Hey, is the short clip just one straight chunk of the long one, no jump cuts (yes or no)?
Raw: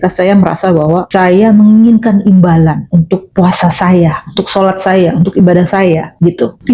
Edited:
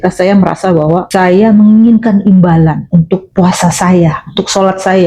yes